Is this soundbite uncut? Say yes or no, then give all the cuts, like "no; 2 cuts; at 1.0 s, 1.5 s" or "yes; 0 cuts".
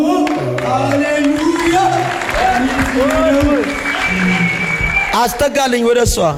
yes; 0 cuts